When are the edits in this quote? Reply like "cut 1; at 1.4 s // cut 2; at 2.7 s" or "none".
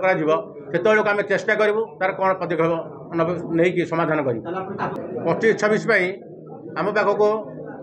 cut 1; at 4.9 s